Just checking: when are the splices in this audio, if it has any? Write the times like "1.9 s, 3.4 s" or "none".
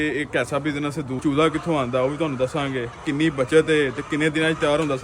1.2 s, 3.0 s